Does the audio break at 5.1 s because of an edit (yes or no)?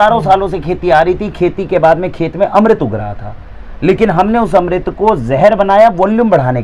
no